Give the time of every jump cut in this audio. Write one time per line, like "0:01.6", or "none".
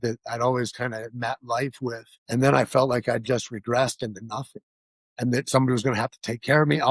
0:02.1